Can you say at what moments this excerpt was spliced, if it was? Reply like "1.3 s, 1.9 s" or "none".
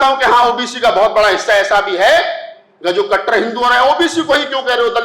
none